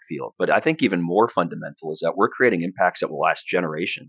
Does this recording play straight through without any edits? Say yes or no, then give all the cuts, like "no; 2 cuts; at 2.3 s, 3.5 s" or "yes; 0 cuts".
yes; 0 cuts